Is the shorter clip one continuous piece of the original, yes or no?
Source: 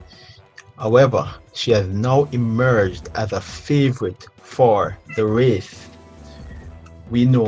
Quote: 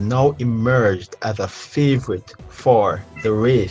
yes